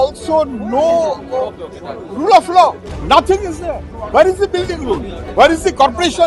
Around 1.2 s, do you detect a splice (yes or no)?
no